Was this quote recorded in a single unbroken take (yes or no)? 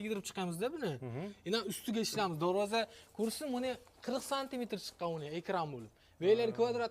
yes